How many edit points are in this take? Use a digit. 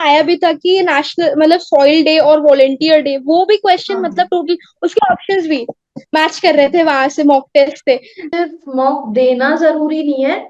1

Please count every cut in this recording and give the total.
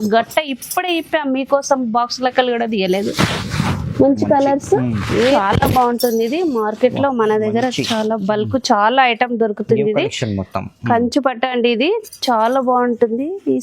1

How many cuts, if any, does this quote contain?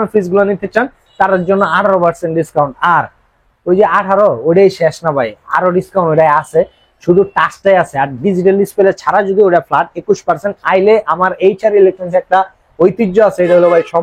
0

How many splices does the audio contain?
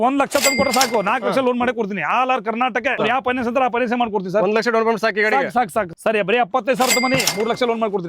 2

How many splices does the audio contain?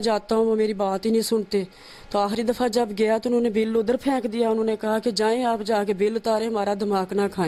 0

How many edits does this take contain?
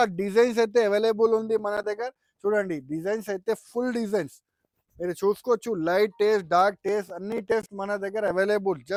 0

